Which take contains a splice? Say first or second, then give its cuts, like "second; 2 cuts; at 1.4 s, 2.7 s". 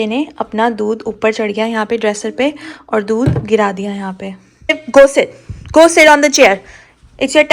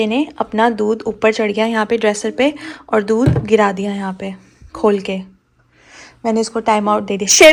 first; 1 cut; at 4.8 s